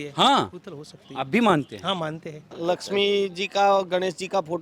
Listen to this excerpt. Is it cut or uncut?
cut